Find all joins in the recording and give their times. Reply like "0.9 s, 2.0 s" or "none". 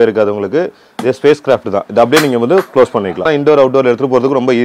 3.2 s